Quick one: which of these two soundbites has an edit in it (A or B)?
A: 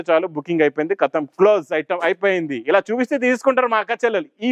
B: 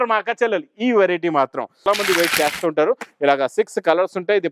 B